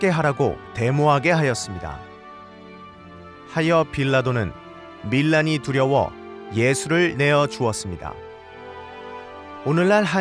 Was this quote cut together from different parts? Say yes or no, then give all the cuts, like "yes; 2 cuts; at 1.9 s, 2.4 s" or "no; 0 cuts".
no; 0 cuts